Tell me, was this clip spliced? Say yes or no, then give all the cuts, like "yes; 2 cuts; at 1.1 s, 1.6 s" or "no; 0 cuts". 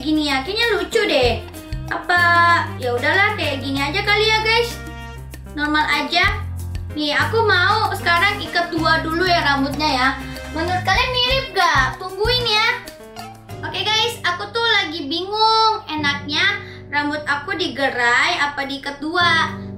no; 0 cuts